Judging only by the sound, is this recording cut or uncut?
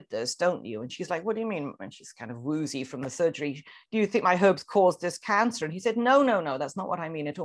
uncut